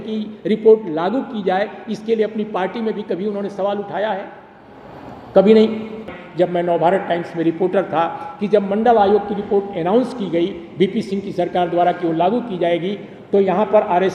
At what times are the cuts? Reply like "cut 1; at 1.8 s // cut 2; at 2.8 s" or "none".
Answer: cut 1; at 6.0 s